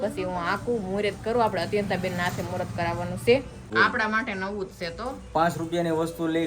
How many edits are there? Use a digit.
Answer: 1